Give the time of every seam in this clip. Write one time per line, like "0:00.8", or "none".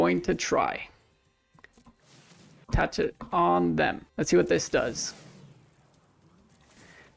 0:01.6
0:02.6
0:04.0